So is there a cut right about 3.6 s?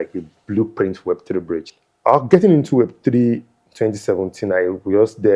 no; 1 cut; at 1.7 s

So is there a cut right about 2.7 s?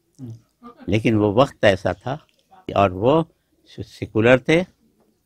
yes; 1 cut; at 2.7 s

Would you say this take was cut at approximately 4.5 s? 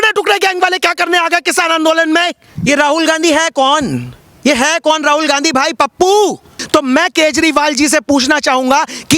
no; 2 cuts; at 2.6 s, 6.5 s

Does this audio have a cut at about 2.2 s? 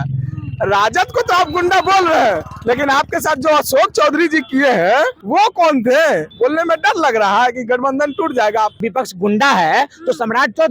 no; 3 cuts; at 5.2 s, 6.3 s, 8.8 s

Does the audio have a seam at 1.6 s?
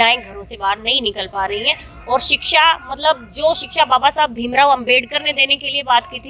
no; 0 cuts

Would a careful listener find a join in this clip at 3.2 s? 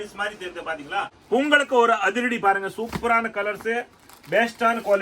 no; 1 cut; at 1.1 s

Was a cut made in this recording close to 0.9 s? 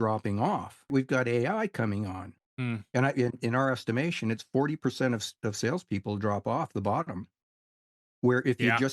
yes; 2 cuts; at 0.9 s, 2.3 s

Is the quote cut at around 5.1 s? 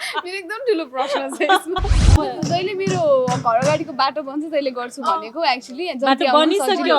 no; 1 cut; at 1.9 s

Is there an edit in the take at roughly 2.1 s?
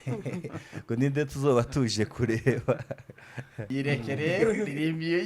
no; 1 cut; at 3.6 s

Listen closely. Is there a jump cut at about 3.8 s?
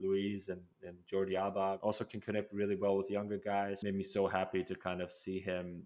yes; 2 cuts; at 1.8 s, 3.8 s

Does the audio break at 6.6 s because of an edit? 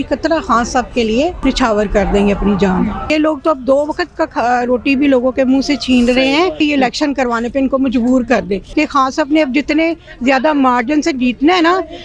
yes; 4 cuts; at 1.4 s, 3.1 s, 6.6 s, 8.6 s

